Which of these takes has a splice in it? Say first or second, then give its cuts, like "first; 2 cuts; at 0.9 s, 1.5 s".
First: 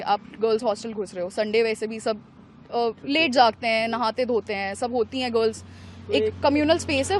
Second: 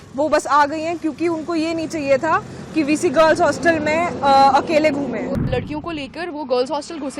second; 1 cut; at 5.4 s